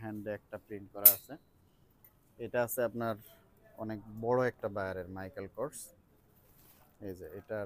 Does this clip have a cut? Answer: no; 0 cuts

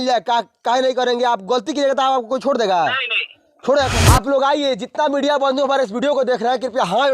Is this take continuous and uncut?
no; 1 cut; at 3.9 s

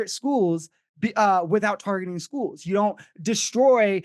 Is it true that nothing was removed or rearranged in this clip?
yes; 0 cuts

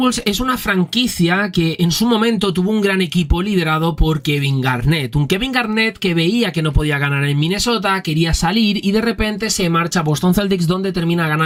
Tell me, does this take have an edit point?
no; 0 cuts

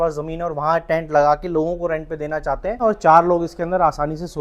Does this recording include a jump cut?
yes; 1 cut; at 2.8 s

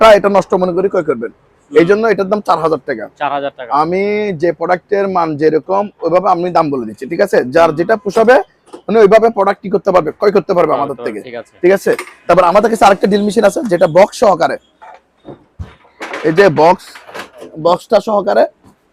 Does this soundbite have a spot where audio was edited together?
no; 0 cuts

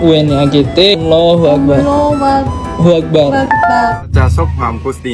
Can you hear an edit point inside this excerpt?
yes; 1 cut; at 4.0 s

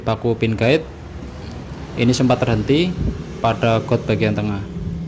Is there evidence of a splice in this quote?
no; 0 cuts

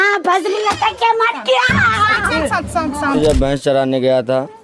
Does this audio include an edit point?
yes; 1 cut; at 3.2 s

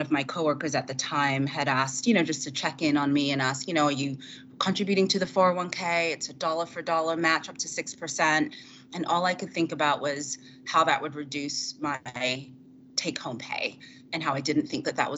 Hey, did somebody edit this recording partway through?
no; 0 cuts

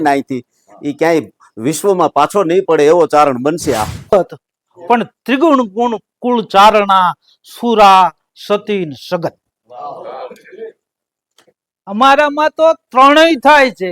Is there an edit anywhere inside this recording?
yes; 1 cut; at 4.1 s

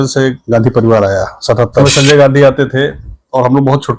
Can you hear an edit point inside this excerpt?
yes; 1 cut; at 1.8 s

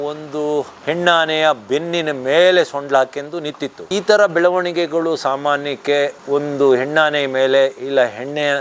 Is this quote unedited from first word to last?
yes; 0 cuts

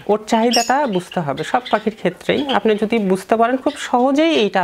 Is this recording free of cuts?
yes; 0 cuts

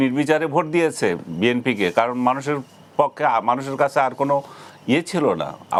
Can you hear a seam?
no; 0 cuts

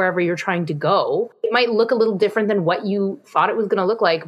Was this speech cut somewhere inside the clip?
yes; 1 cut; at 1.2 s

